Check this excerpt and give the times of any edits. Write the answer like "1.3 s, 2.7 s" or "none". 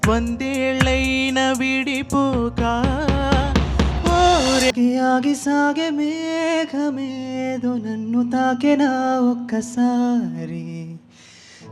4.7 s